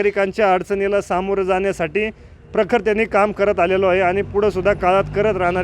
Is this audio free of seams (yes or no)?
yes